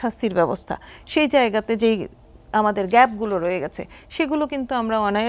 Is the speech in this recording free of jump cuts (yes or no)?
yes